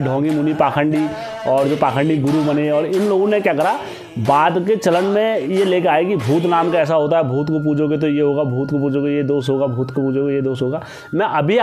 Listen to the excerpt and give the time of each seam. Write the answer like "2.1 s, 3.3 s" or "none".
none